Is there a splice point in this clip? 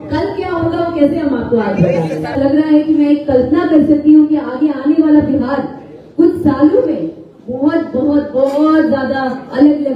yes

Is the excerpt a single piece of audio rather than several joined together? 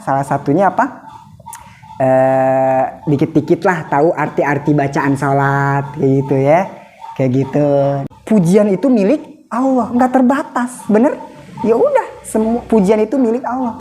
no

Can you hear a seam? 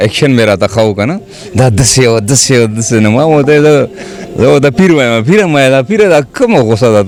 no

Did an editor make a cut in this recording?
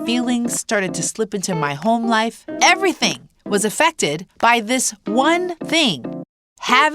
yes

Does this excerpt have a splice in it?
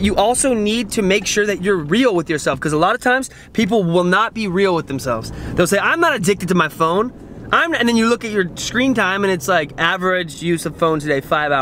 no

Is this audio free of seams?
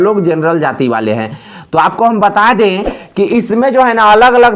yes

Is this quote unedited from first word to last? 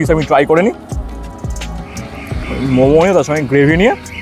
yes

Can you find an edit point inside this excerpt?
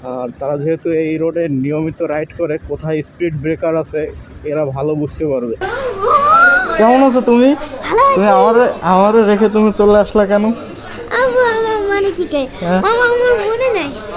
yes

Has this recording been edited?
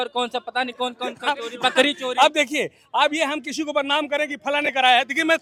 no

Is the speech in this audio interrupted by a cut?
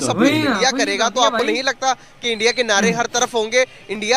no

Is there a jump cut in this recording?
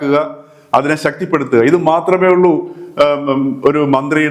no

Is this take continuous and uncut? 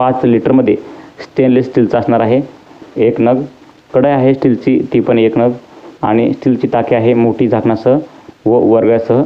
yes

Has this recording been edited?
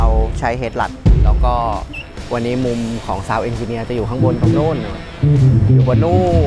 yes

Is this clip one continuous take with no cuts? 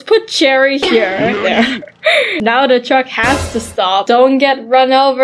yes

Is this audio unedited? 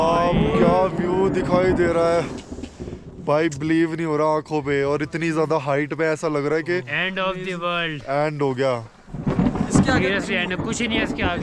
yes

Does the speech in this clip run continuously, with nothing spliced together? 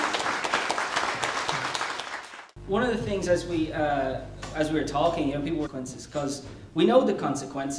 yes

